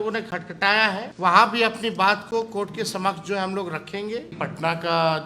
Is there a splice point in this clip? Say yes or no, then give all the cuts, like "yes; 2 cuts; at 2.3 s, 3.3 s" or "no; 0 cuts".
yes; 2 cuts; at 1.1 s, 4.4 s